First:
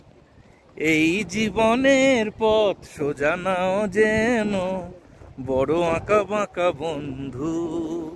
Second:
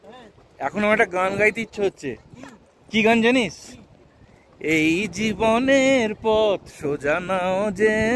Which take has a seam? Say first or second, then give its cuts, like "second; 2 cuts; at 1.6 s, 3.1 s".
second; 1 cut; at 2.9 s